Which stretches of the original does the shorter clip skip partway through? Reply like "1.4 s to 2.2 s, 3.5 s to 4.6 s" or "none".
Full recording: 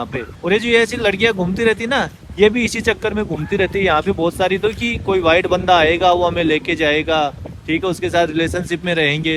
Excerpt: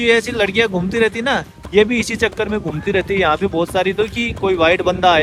none